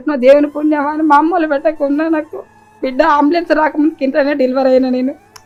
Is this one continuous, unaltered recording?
yes; 0 cuts

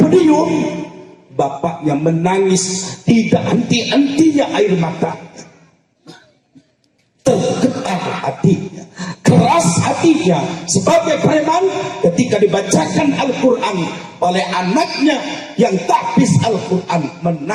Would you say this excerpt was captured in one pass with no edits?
yes; 0 cuts

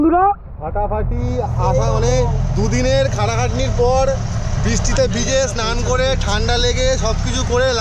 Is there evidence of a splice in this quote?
no; 0 cuts

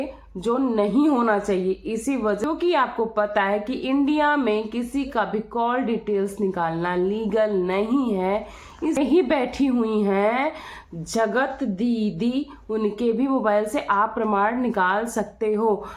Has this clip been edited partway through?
yes; 2 cuts; at 2.4 s, 9.0 s

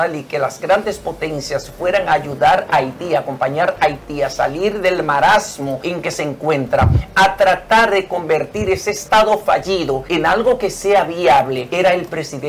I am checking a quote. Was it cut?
yes; 4 cuts; at 5.8 s, 9.0 s, 10.0 s, 11.7 s

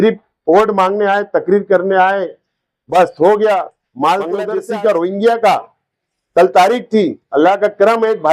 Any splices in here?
yes; 1 cut; at 4.5 s

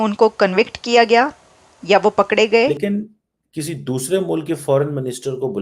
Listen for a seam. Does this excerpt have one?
yes; 1 cut; at 2.7 s

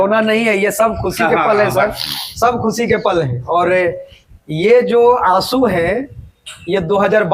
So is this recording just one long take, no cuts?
yes; 0 cuts

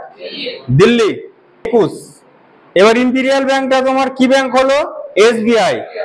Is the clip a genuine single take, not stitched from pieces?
no; 1 cut; at 1.7 s

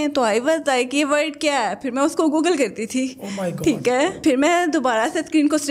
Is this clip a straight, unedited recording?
yes; 0 cuts

